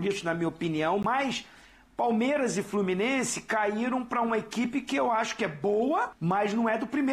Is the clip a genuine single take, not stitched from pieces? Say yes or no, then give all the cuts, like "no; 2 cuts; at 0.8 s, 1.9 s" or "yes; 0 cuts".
no; 2 cuts; at 1.0 s, 6.1 s